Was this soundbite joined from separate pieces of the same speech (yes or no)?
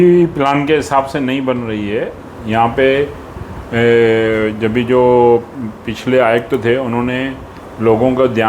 no